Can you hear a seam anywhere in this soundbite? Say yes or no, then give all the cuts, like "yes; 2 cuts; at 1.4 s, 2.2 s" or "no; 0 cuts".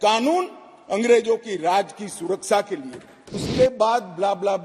yes; 1 cut; at 3.4 s